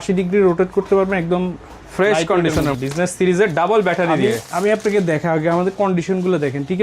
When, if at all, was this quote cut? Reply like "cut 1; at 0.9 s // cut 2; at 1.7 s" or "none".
cut 1; at 2.7 s